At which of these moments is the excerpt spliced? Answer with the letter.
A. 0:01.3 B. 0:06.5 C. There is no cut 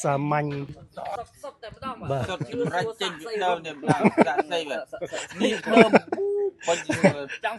A